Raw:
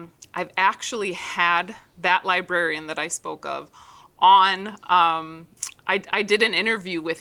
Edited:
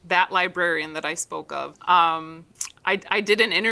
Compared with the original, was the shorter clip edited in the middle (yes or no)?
yes